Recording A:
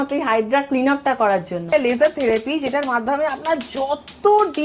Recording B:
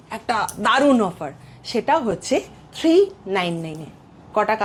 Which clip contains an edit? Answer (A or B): A